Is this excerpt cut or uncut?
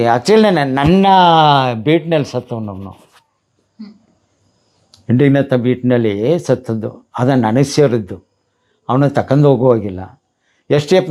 uncut